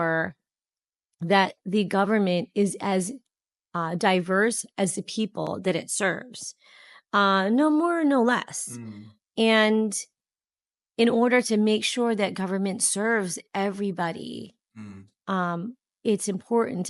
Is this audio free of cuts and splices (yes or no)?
yes